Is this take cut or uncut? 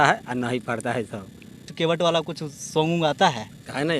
cut